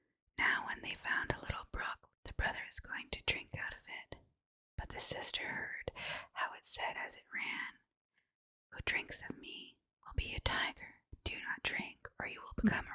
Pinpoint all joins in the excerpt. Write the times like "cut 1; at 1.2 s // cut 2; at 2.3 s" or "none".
cut 1; at 2.1 s // cut 2; at 11.1 s